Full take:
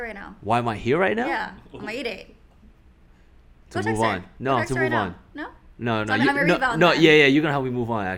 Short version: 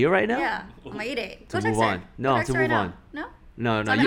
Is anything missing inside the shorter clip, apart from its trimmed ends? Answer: yes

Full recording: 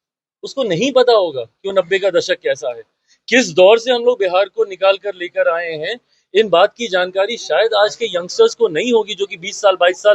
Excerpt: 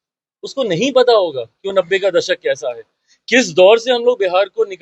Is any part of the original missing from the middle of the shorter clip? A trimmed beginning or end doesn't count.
no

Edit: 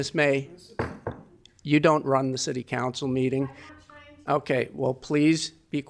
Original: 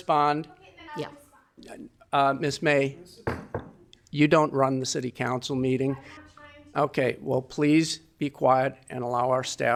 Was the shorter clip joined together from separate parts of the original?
no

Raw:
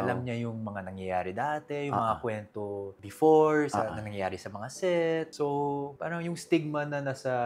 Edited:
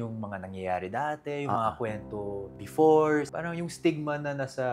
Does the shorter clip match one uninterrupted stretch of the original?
no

